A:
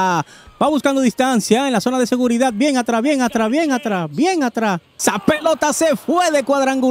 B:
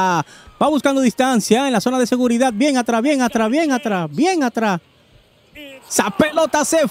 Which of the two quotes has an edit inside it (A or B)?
A